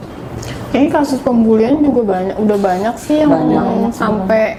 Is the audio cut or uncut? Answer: uncut